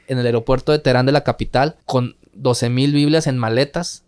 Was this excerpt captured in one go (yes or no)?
no